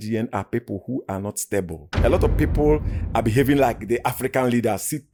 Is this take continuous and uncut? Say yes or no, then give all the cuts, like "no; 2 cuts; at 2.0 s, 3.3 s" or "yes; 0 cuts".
yes; 0 cuts